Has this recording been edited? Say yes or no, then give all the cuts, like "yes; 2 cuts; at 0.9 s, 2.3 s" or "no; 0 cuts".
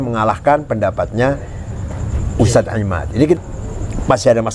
yes; 1 cut; at 3.4 s